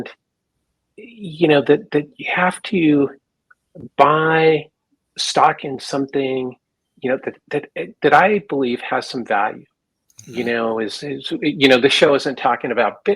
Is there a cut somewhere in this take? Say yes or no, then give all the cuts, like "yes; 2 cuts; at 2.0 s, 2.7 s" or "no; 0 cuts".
no; 0 cuts